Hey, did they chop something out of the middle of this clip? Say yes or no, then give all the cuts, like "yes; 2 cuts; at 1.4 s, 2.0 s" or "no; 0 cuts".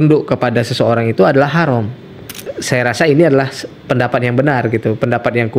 yes; 1 cut; at 2.3 s